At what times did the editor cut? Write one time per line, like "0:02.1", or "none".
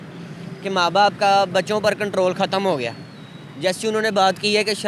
none